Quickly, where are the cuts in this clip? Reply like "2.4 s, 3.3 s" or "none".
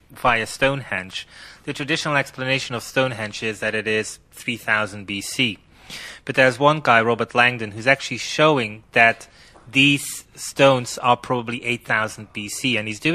none